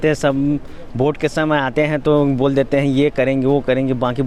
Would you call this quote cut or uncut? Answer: uncut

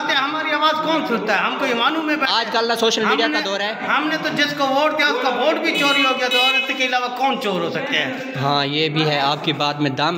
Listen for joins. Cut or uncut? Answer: uncut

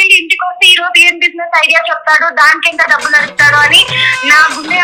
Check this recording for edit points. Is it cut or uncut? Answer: uncut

